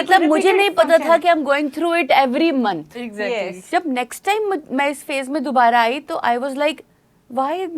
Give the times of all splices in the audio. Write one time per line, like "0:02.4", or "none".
0:03.6